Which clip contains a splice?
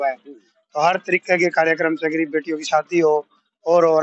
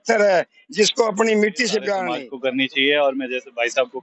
second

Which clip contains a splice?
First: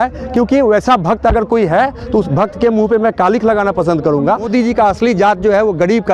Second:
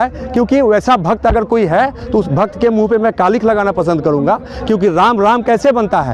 first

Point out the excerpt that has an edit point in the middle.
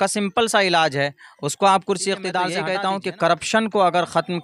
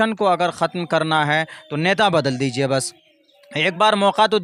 first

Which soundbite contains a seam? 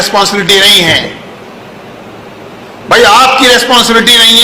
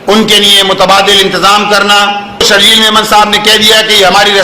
second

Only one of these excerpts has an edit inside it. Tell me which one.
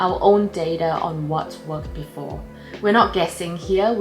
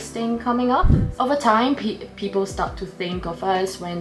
second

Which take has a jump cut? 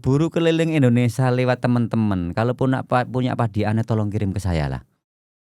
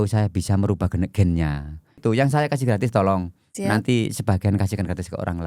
second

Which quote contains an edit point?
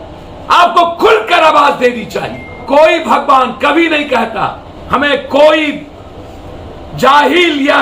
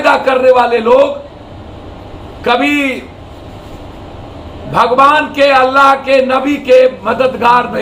first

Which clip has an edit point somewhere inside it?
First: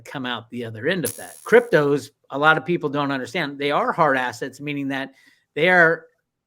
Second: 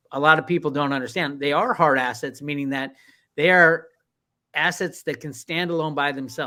first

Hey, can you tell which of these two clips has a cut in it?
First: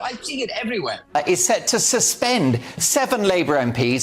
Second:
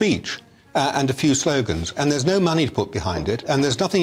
first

